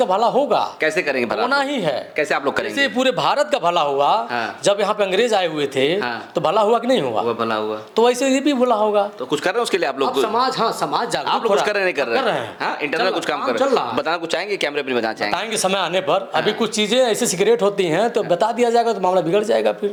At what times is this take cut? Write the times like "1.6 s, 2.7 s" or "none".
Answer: none